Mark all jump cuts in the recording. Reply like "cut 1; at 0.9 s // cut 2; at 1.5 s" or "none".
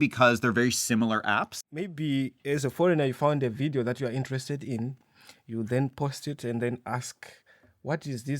cut 1; at 1.6 s